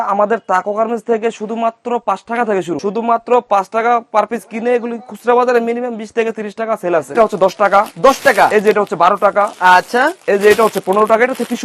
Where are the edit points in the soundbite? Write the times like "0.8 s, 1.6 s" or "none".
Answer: 2.8 s, 7.2 s